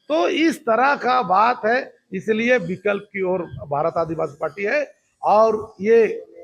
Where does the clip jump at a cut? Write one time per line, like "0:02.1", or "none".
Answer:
none